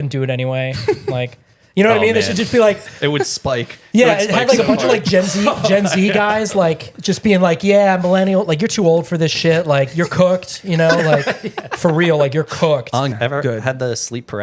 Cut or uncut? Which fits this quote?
cut